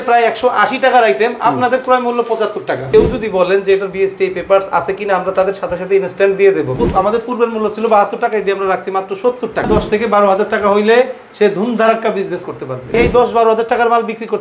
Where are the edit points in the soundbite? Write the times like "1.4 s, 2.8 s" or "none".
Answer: 2.8 s, 6.8 s, 9.7 s, 12.9 s